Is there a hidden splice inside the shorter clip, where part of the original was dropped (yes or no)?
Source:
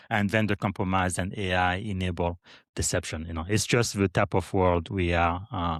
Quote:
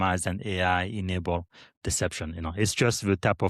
no